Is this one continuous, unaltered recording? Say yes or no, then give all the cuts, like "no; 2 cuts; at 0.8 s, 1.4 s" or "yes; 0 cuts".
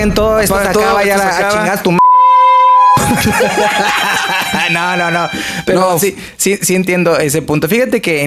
yes; 0 cuts